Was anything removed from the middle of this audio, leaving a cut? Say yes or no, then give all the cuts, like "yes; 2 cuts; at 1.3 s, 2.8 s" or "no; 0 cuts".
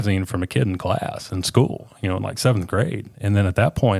no; 0 cuts